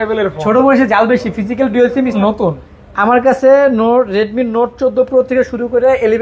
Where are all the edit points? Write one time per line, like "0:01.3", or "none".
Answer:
0:02.2